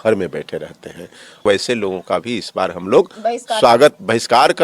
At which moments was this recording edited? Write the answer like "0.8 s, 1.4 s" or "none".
1.4 s